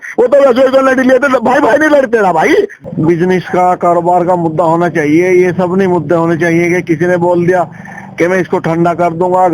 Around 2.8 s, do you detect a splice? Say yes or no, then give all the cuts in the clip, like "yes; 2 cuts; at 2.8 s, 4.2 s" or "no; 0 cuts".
yes; 1 cut; at 2.8 s